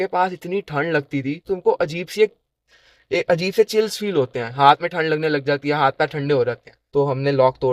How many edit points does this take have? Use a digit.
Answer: 2